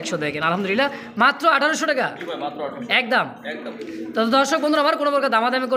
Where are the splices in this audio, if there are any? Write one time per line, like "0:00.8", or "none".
none

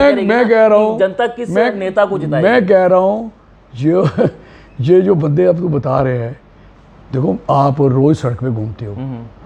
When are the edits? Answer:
none

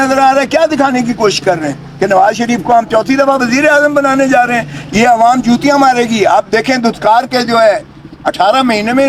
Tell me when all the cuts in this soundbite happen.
none

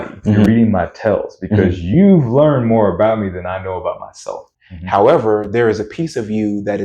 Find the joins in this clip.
0:04.4

